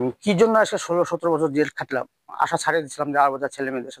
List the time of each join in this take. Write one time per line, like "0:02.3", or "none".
0:02.4